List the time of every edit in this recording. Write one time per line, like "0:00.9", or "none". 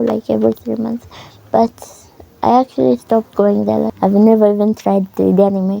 0:03.9